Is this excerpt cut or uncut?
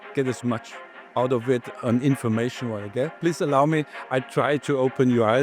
cut